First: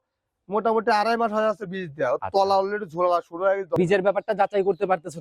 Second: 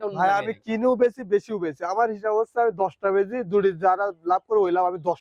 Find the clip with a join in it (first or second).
first